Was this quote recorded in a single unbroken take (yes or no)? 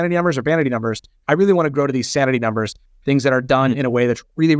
no